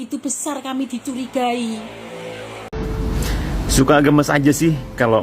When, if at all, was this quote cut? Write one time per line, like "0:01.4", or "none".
0:02.6